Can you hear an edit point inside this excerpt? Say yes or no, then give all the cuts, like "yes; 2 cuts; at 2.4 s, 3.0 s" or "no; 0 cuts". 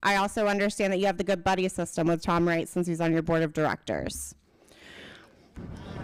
no; 0 cuts